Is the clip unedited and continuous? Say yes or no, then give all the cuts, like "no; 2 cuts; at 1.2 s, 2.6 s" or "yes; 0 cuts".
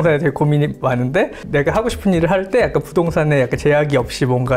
yes; 0 cuts